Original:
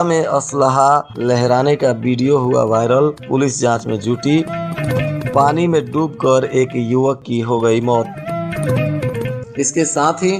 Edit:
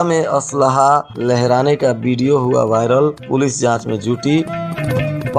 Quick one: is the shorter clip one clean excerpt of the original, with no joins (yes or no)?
yes